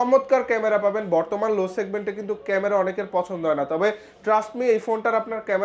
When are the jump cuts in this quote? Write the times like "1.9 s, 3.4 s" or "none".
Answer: none